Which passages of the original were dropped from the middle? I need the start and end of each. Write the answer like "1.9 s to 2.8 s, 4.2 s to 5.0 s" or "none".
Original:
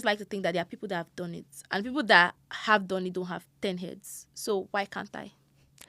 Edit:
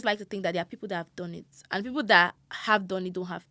none